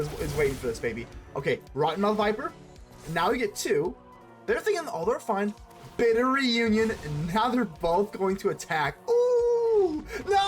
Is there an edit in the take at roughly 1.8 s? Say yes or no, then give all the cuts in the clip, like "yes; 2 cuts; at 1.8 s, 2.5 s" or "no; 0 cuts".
no; 1 cut; at 4.2 s